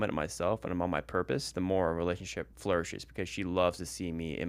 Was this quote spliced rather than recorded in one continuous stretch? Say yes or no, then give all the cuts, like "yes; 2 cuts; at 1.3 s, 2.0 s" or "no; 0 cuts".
yes; 1 cut; at 2.5 s